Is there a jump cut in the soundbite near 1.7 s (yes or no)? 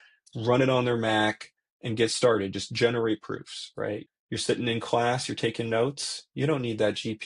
no